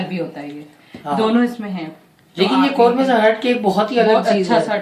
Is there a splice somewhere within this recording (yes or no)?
no